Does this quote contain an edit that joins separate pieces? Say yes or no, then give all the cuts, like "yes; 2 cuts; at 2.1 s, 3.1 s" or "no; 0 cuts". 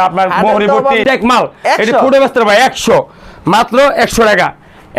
yes; 1 cut; at 1.0 s